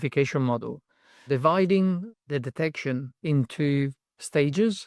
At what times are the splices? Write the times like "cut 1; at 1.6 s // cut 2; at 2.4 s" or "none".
cut 1; at 1.2 s // cut 2; at 2.1 s